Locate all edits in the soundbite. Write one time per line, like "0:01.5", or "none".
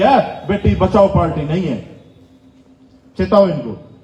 none

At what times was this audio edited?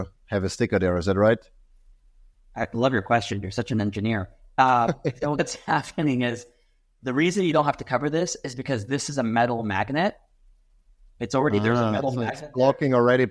none

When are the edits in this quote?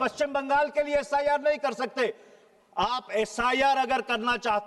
none

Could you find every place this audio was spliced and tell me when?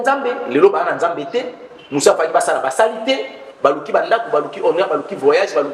none

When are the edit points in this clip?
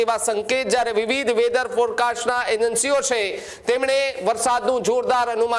none

